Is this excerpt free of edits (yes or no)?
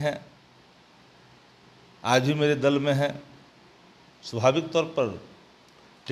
yes